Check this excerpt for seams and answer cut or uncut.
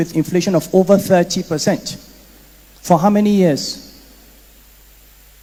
uncut